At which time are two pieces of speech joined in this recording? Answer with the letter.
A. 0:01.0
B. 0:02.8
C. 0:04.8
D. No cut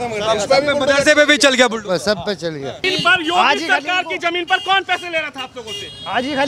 B